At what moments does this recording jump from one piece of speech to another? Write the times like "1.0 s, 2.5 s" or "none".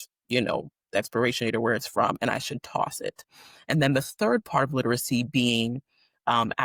none

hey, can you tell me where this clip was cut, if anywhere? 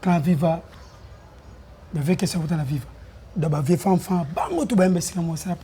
none

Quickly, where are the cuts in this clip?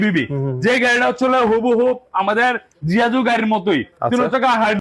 none

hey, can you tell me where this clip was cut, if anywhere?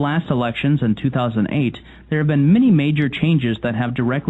3.1 s

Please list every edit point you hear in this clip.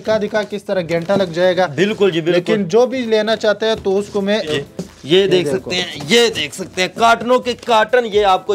4.5 s

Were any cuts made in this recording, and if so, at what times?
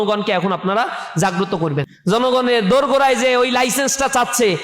1.9 s

